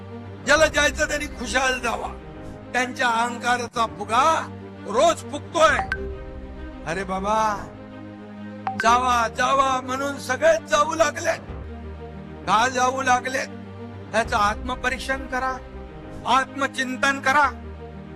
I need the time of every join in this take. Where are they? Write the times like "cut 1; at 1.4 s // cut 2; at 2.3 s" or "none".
none